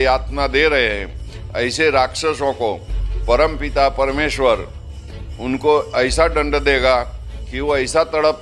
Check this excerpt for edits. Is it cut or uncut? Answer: uncut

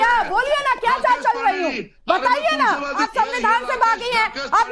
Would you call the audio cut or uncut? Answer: cut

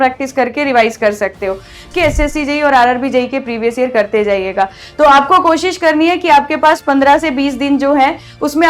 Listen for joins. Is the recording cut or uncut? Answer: cut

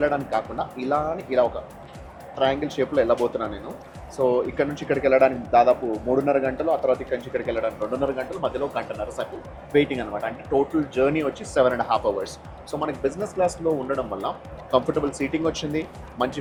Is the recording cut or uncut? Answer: uncut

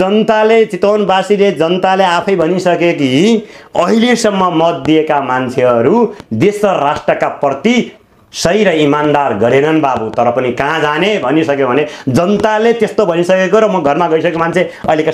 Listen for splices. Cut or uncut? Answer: uncut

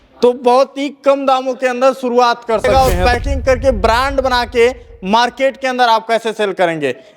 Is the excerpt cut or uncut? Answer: cut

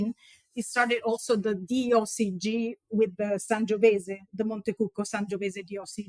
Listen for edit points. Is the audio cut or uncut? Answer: uncut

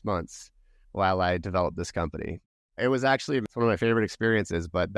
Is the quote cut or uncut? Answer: cut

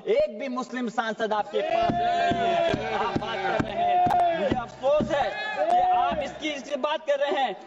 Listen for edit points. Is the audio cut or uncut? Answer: uncut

